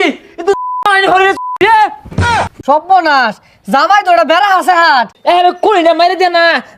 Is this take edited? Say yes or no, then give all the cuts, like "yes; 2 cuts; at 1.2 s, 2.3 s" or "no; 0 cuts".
yes; 2 cuts; at 2.3 s, 5.1 s